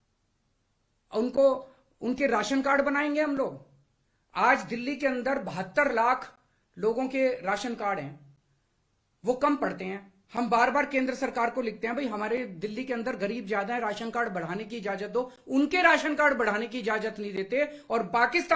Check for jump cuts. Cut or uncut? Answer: uncut